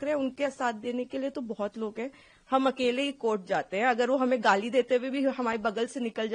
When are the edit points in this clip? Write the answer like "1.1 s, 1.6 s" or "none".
none